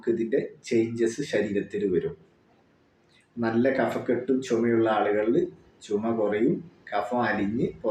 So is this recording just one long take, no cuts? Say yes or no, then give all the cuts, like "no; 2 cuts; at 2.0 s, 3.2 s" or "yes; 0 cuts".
yes; 0 cuts